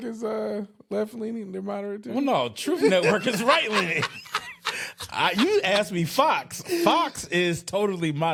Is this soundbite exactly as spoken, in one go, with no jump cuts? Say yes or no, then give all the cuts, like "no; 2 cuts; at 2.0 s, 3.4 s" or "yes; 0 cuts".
yes; 0 cuts